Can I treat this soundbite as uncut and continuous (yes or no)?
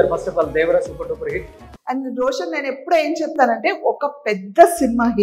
no